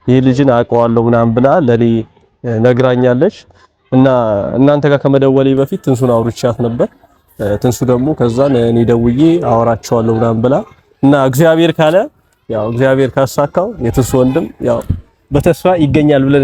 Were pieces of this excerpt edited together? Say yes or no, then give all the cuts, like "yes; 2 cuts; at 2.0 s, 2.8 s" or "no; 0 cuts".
no; 0 cuts